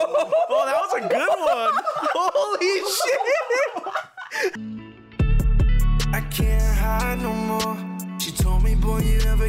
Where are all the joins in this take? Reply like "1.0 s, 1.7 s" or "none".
4.6 s